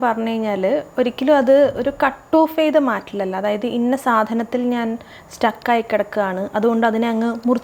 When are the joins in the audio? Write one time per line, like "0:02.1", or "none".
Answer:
none